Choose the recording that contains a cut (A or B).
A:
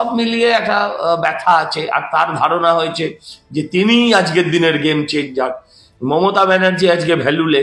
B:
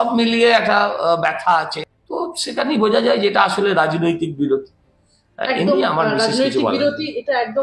B